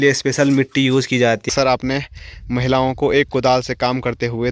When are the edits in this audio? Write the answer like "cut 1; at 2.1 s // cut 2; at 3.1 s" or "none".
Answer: cut 1; at 1.5 s